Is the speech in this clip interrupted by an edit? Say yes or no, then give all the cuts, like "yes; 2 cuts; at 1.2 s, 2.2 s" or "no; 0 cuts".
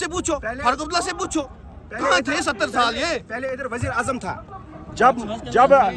no; 0 cuts